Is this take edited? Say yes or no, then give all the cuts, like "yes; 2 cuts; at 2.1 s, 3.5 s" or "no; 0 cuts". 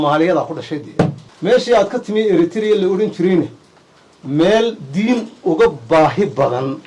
yes; 1 cut; at 1.2 s